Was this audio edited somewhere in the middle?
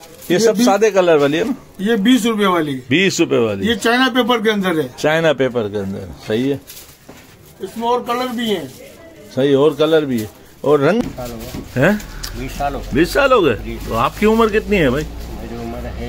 yes; 1 cut; at 11.0 s

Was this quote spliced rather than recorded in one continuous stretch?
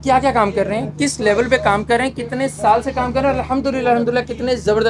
no; 0 cuts

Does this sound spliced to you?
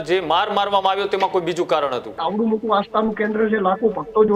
yes; 1 cut; at 2.2 s

